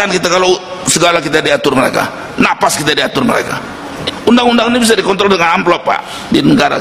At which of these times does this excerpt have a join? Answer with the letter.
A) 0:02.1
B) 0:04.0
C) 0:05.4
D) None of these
B